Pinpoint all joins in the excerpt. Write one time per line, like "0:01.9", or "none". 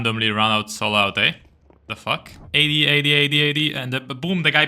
0:02.4